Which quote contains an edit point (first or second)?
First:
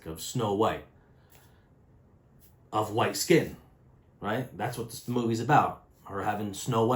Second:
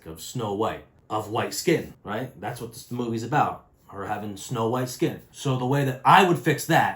second